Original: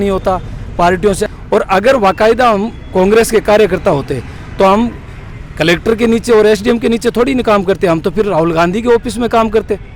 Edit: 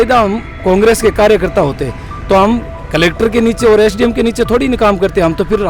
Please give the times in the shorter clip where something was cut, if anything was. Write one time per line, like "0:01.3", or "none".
0:02.8